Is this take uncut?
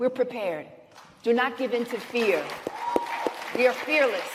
yes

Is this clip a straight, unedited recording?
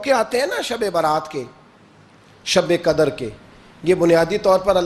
yes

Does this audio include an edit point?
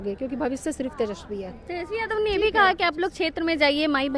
no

